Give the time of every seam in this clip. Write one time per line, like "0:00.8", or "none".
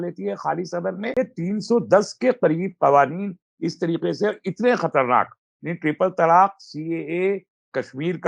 0:01.2